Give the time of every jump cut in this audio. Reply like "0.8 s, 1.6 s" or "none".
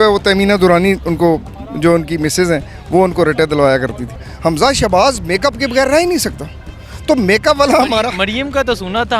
4.2 s